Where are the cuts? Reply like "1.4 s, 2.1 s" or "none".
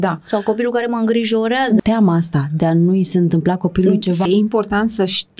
1.8 s, 4.3 s